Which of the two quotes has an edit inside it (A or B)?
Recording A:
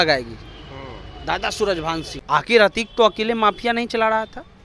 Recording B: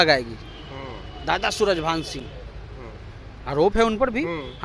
A